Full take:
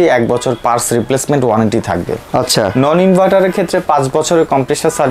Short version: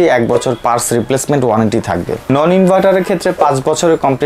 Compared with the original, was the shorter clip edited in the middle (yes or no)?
yes